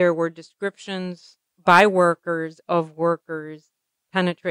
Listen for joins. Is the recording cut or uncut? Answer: cut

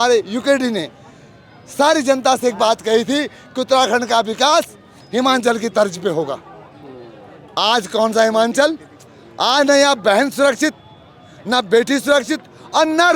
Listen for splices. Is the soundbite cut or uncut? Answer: uncut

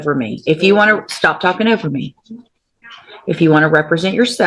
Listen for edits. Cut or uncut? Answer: uncut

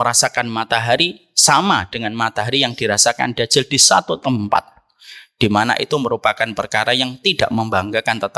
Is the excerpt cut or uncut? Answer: uncut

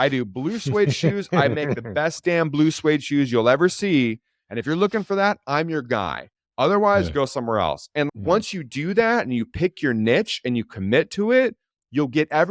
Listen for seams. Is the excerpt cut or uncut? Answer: uncut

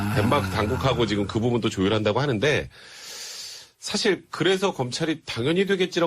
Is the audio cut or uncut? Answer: cut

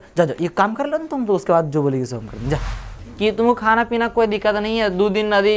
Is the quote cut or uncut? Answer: cut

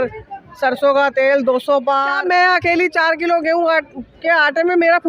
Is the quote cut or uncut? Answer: cut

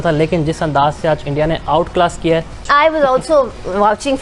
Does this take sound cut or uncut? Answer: cut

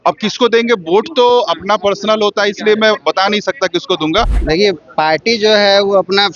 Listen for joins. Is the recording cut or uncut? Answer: cut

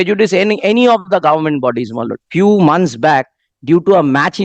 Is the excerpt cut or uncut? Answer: cut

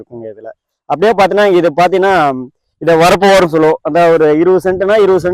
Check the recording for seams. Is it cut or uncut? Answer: uncut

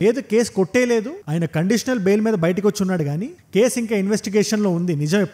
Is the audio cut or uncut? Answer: uncut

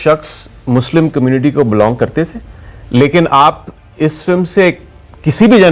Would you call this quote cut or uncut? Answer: uncut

